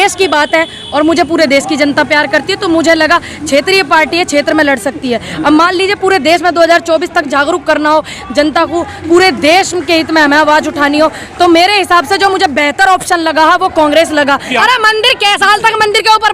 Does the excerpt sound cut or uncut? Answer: cut